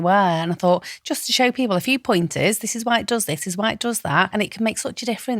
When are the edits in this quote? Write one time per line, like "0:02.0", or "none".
0:04.3